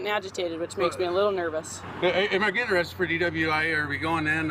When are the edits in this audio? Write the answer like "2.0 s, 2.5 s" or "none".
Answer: 1.8 s